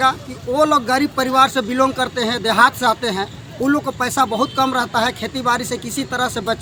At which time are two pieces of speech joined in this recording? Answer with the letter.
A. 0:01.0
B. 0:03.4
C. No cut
C